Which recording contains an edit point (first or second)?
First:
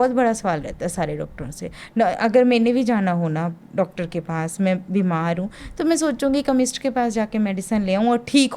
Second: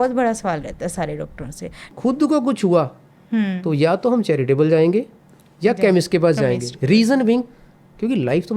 second